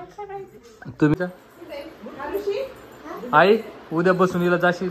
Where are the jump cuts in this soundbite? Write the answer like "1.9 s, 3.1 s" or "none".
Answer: 1.1 s